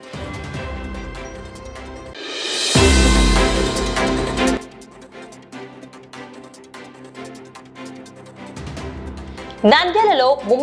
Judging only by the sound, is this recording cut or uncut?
cut